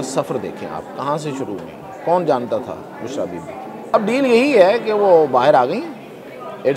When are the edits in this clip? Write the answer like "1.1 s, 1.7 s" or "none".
3.9 s